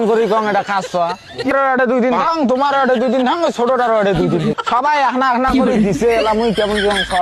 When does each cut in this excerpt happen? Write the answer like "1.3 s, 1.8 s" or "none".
1.5 s, 4.5 s